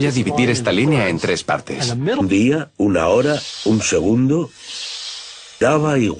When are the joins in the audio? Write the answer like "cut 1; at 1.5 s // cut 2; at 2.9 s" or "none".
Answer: none